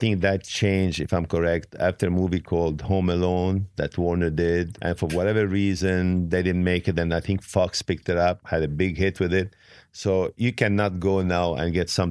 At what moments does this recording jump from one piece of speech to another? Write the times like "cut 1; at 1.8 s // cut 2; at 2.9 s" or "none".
cut 1; at 4.8 s // cut 2; at 8.4 s